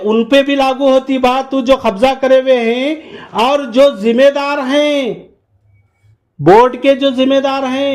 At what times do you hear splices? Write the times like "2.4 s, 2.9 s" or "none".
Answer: none